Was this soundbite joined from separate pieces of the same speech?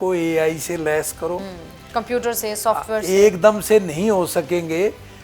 no; 0 cuts

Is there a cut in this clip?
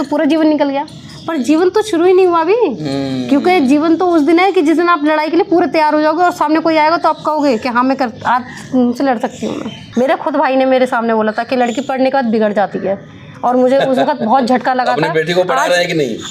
yes; 1 cut; at 9.8 s

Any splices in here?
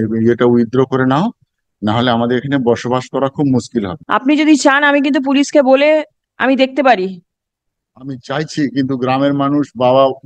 yes; 1 cut; at 4.0 s

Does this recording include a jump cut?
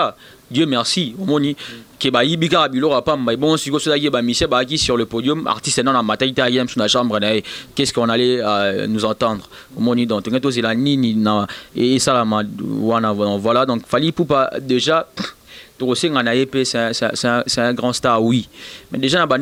no; 0 cuts

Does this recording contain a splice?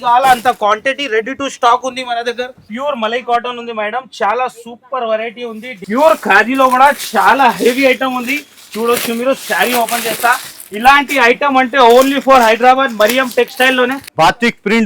yes; 3 cuts; at 2.7 s, 5.7 s, 14.0 s

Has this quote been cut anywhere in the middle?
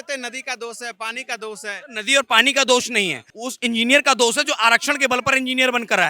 no; 0 cuts

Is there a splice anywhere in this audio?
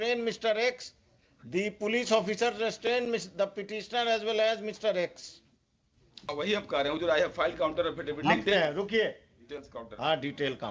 yes; 1 cut; at 6.3 s

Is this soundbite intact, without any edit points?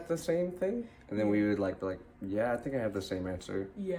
yes; 0 cuts

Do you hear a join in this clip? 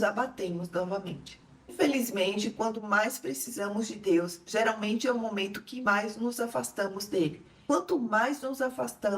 yes; 1 cut; at 1.7 s

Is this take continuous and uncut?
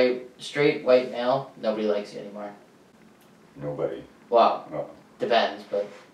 yes; 0 cuts

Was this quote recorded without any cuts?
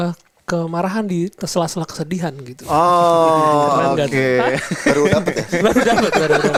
yes; 0 cuts

